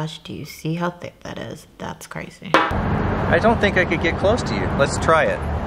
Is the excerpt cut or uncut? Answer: cut